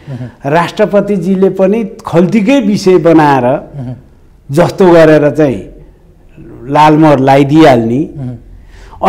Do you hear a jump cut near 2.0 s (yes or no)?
no